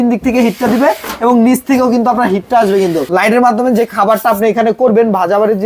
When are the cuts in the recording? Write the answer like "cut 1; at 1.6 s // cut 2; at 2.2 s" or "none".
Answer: cut 1; at 3.0 s

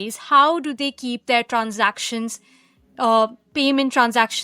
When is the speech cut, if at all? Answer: none

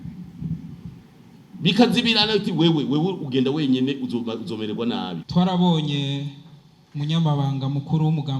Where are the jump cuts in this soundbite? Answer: cut 1; at 5.2 s

